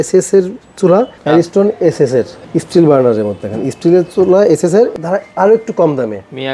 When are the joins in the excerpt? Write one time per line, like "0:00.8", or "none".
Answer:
0:01.2
0:02.4
0:04.9